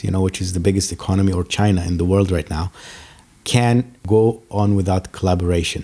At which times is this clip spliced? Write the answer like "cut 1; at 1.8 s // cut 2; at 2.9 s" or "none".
cut 1; at 4.0 s